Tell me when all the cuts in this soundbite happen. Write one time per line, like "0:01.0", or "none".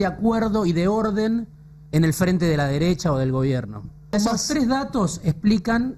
0:04.1